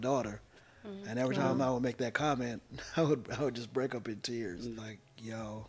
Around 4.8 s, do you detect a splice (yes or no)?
yes